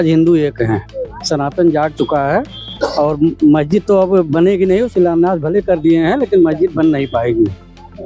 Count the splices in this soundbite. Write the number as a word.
zero